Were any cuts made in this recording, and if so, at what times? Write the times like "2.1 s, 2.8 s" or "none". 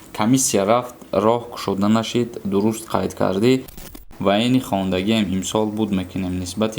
3.8 s